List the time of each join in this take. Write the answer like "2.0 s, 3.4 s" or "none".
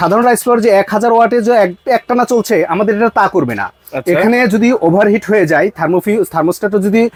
none